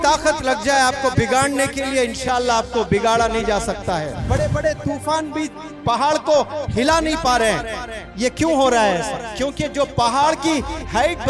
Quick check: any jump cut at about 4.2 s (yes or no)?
yes